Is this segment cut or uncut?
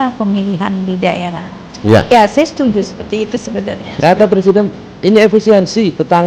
cut